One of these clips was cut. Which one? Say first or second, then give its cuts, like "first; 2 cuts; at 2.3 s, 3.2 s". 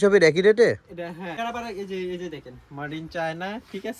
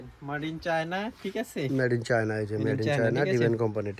first; 1 cut; at 1.3 s